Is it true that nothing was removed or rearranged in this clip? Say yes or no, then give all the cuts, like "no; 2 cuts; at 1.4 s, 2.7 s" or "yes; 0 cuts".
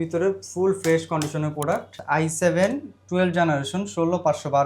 no; 1 cut; at 1.9 s